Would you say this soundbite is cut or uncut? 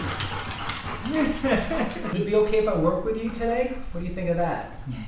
cut